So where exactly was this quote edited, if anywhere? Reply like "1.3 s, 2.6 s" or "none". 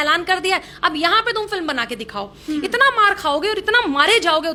none